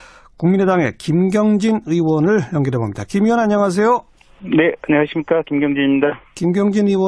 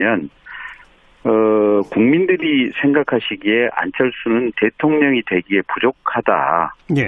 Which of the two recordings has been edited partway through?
second; 1 cut; at 2.2 s

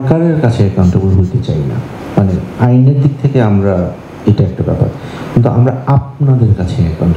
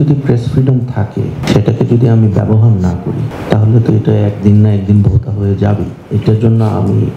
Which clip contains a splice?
second; 2 cuts; at 1.4 s, 3.3 s

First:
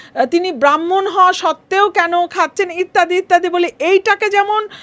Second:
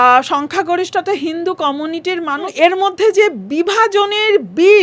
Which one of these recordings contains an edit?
second; 1 cut; at 2.5 s

